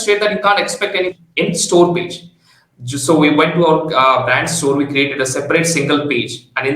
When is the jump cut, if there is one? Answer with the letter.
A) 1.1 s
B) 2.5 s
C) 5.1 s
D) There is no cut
A